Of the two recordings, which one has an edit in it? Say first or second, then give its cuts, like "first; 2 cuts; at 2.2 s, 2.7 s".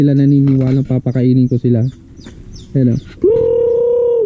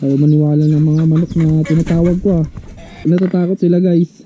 second; 1 cut; at 3.0 s